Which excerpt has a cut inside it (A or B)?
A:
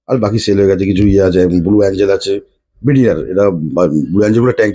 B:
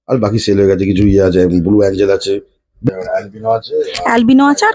B